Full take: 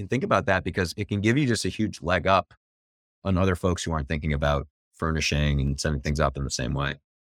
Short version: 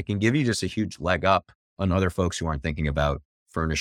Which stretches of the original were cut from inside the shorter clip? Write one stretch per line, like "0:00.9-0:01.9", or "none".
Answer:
0:02.6-0:03.1